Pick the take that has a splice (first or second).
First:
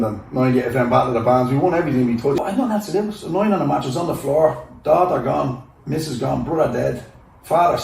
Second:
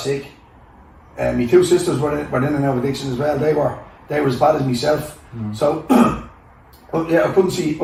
first